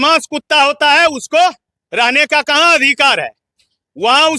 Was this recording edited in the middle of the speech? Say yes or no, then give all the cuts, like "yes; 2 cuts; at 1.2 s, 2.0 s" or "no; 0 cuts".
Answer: no; 0 cuts